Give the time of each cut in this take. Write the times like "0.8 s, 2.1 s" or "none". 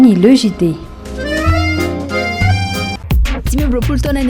3.0 s